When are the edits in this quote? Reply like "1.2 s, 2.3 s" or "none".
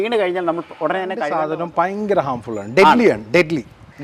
1.3 s

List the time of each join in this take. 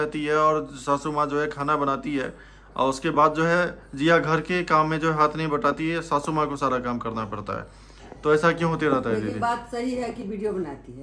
none

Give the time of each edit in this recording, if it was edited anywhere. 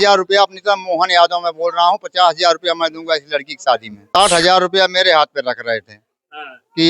4.0 s

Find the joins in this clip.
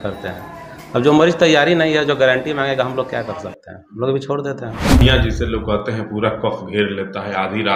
5.0 s

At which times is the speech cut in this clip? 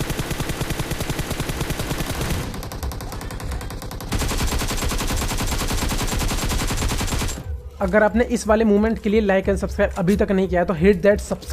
7.7 s

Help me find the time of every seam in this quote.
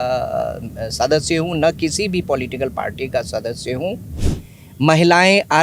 4.1 s

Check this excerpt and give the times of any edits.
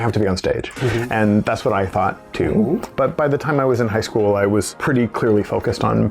2.9 s, 4.7 s

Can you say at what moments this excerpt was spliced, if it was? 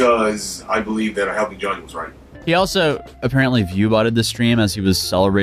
2.2 s

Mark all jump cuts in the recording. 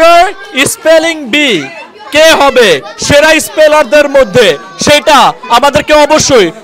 none

